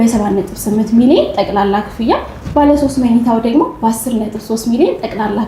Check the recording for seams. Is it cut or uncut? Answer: uncut